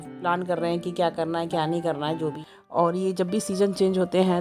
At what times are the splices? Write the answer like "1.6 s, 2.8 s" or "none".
2.4 s